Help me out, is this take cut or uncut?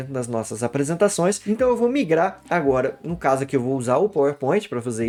uncut